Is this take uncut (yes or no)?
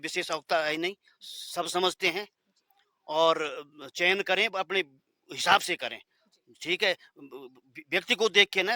yes